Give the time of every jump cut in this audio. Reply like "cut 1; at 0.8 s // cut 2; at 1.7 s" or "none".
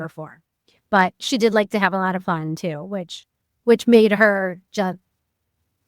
cut 1; at 1.2 s